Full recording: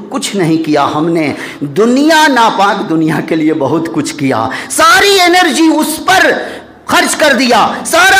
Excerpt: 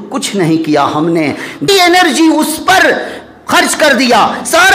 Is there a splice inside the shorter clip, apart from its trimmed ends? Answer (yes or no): yes